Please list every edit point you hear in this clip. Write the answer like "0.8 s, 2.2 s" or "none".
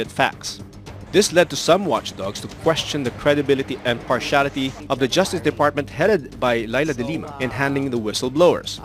6.3 s